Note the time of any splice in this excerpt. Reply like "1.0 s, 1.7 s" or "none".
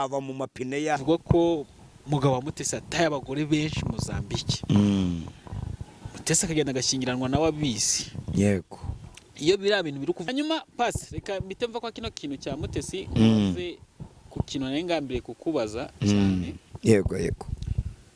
1.0 s, 10.2 s